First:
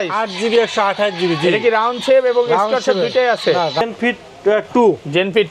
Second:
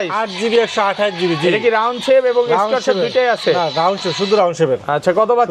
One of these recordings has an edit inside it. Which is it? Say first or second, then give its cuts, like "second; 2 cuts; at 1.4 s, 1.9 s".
first; 1 cut; at 3.8 s